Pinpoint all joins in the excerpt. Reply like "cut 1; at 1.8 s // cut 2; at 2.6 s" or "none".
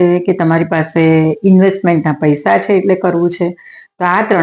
none